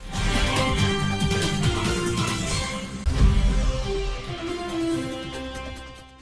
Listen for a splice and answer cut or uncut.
cut